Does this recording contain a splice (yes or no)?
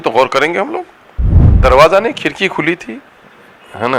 yes